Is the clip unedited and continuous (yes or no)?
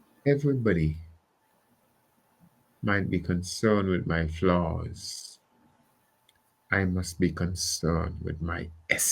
yes